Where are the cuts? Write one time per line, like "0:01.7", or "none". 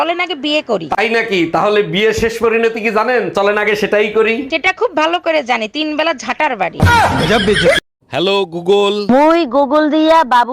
0:07.8